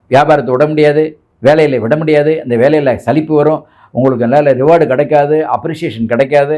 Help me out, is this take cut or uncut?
uncut